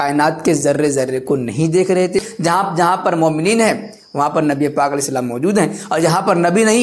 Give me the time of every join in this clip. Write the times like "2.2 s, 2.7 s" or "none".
2.3 s